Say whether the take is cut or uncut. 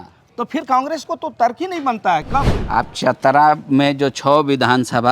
cut